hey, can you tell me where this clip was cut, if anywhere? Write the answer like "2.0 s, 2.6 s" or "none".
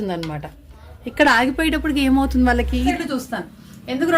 2.9 s

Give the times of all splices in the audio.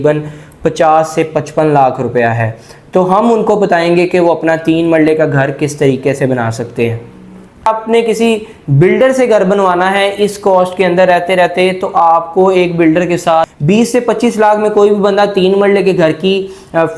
7.7 s, 13.5 s

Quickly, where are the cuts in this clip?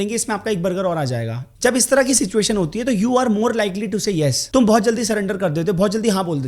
none

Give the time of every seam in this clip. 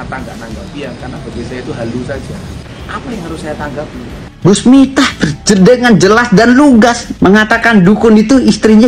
2.7 s, 4.3 s, 7.1 s

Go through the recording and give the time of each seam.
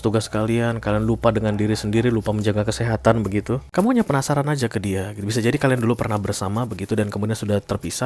3.6 s

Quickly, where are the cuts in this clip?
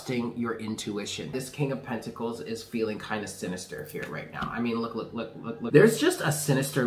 1.3 s, 5.6 s

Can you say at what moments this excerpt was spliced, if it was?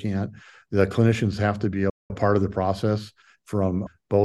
none

